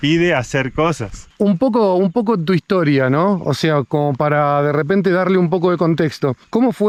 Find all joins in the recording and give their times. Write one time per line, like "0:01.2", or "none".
none